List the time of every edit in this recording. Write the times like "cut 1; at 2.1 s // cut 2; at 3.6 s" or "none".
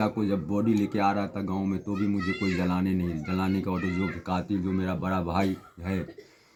none